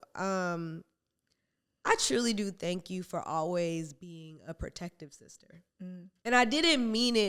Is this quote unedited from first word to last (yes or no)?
no